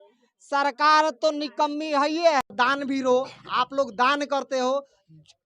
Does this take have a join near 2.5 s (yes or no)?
yes